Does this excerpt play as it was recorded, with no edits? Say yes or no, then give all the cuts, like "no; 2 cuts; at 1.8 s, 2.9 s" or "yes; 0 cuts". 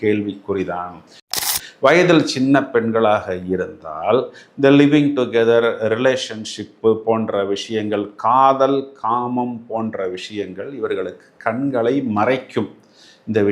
no; 1 cut; at 1.5 s